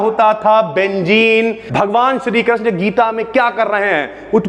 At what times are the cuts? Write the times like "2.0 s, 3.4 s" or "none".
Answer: 1.6 s